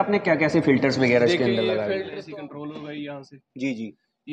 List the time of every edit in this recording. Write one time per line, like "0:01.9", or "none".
0:02.0